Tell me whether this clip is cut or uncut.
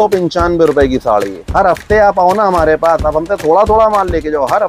cut